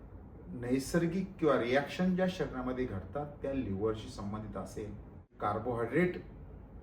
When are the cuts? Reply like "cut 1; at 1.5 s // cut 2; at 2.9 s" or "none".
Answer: cut 1; at 5.4 s